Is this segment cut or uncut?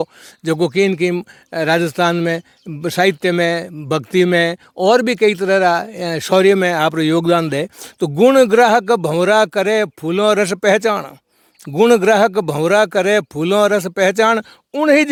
uncut